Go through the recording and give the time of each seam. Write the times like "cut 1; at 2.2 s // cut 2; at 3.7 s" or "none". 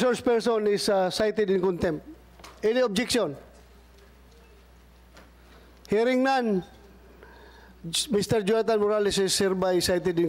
none